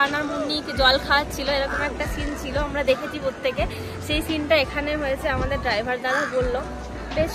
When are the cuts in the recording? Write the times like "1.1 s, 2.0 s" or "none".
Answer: none

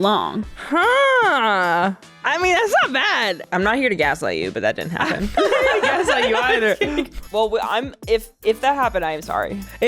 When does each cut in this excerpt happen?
2.1 s, 7.2 s

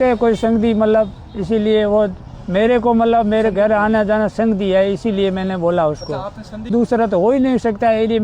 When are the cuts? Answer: 6.7 s

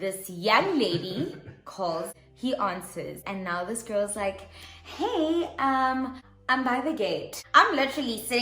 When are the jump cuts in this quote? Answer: 2.2 s, 7.4 s

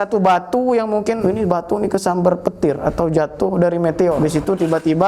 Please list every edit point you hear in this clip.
1.2 s, 4.2 s

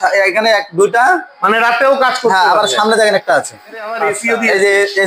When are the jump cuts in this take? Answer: 4.1 s

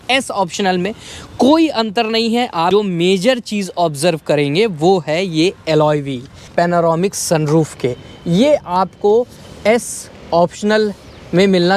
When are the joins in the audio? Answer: 2.7 s, 6.4 s

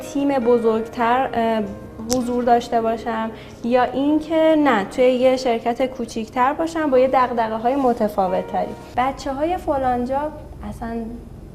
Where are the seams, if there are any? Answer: 8.8 s

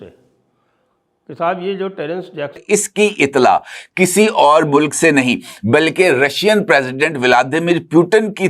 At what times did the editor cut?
2.6 s

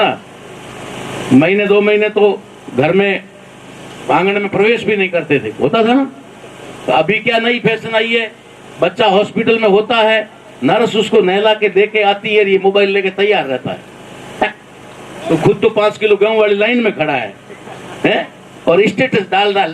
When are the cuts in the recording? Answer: 15.3 s

